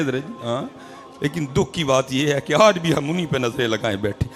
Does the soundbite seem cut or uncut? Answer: cut